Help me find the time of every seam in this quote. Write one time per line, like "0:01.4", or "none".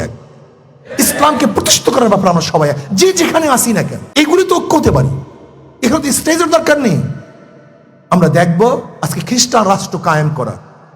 0:04.0